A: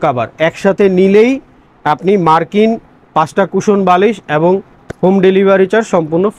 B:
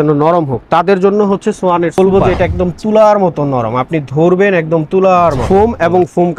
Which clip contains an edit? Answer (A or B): B